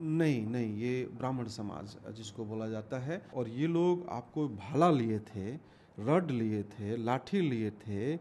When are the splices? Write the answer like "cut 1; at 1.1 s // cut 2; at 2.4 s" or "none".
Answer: cut 1; at 3.3 s